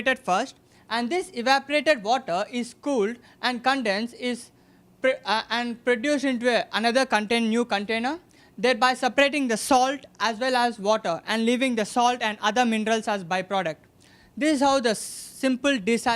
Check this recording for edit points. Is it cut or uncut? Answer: cut